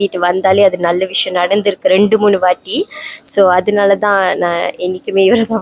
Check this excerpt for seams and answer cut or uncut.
uncut